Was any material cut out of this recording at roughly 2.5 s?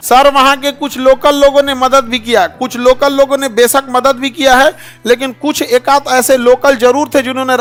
no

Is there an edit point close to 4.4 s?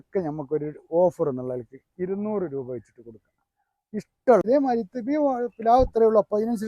yes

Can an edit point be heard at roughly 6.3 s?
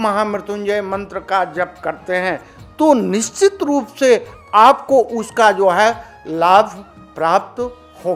no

